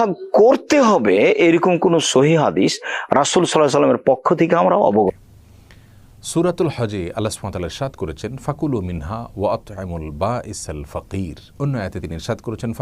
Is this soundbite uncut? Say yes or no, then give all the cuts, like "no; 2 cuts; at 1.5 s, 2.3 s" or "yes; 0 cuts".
no; 1 cut; at 5.1 s